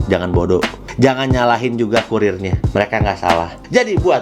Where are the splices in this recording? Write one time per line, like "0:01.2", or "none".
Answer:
none